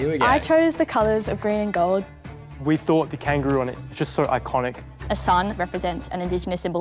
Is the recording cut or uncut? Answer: uncut